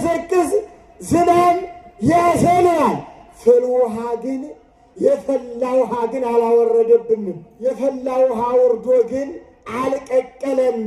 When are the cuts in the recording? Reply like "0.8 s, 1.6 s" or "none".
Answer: 7.4 s